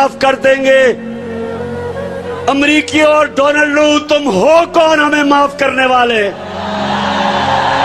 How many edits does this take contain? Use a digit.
2